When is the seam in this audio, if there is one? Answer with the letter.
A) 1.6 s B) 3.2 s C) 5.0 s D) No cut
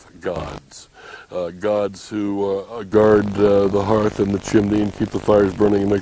C